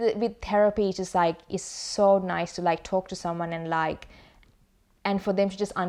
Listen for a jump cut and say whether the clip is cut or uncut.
uncut